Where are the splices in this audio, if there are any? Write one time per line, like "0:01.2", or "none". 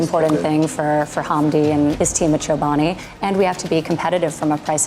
0:02.0